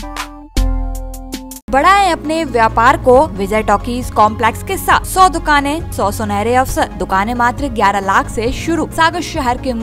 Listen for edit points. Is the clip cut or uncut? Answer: cut